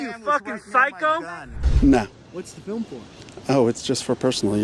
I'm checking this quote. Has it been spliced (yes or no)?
yes